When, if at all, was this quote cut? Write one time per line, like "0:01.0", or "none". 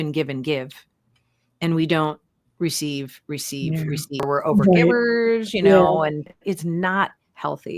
0:04.3
0:06.3